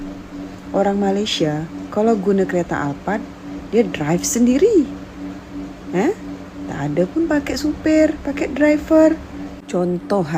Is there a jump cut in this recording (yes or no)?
no